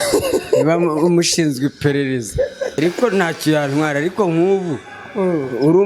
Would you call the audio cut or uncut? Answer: cut